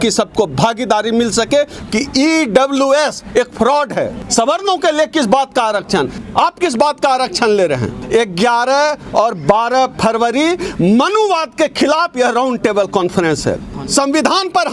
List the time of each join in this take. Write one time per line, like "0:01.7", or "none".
0:01.8
0:04.2
0:06.2
0:08.0
0:13.7